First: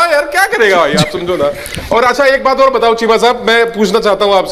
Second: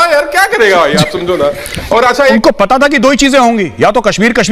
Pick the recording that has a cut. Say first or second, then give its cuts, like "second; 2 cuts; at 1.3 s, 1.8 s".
second; 1 cut; at 2.3 s